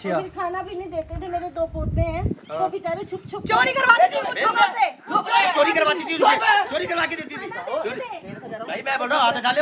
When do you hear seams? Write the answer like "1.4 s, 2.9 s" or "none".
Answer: none